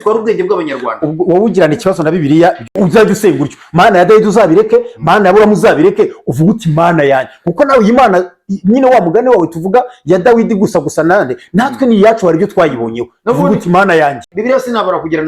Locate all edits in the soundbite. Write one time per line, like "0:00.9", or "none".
0:02.7
0:14.3